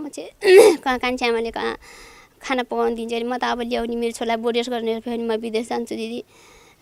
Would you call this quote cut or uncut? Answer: uncut